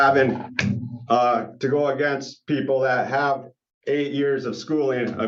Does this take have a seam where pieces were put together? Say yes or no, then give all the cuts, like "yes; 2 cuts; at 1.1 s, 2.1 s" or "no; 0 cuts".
no; 0 cuts